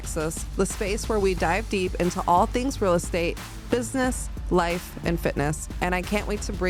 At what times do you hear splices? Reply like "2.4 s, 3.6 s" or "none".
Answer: none